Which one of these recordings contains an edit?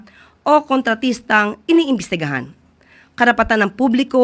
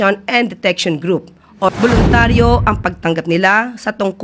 second; 1 cut; at 1.7 s

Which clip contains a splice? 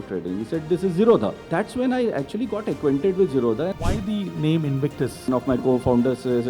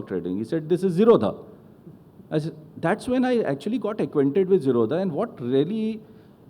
first; 3 cuts; at 1.4 s, 3.8 s, 5.3 s

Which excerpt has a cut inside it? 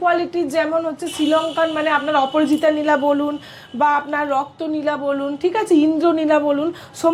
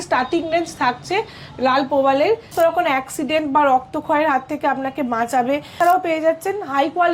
second; 2 cuts; at 2.5 s, 5.8 s

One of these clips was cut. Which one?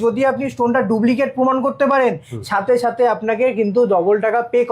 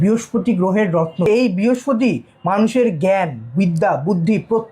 second; 1 cut; at 1.3 s

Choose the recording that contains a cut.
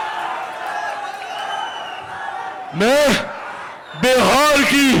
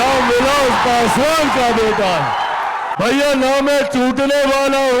second; 1 cut; at 2.9 s

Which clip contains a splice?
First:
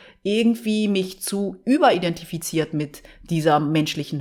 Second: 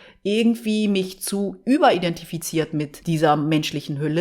second; 1 cut; at 2.9 s

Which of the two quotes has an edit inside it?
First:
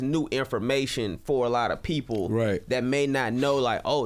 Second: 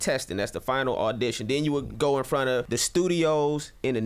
second; 2 cuts; at 1.9 s, 2.7 s

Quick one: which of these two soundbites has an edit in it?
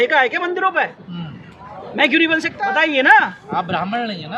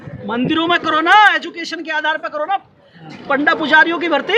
first; 1 cut; at 2.6 s

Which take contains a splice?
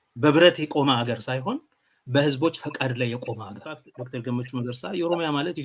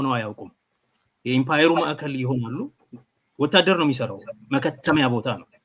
first; 1 cut; at 3.9 s

